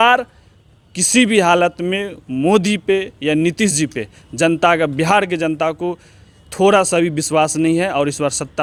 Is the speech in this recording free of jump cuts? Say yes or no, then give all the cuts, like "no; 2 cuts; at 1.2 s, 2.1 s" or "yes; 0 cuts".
yes; 0 cuts